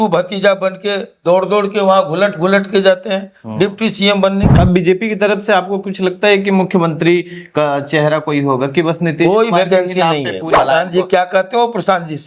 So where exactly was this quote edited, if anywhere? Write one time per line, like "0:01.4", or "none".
0:04.5
0:10.5